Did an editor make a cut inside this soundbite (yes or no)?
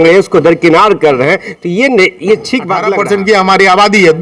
yes